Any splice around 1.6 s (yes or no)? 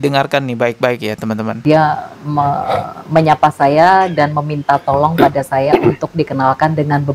yes